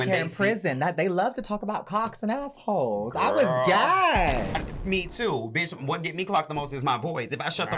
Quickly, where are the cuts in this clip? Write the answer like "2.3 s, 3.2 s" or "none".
4.5 s